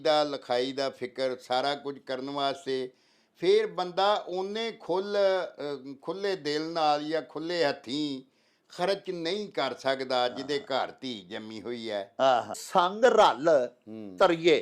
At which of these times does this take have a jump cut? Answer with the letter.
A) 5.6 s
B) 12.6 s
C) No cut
B